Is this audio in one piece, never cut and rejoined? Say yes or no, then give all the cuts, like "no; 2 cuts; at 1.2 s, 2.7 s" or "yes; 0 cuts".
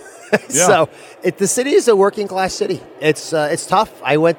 yes; 0 cuts